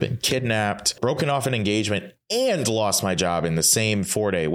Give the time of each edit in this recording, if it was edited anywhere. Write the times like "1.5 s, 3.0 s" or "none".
0.9 s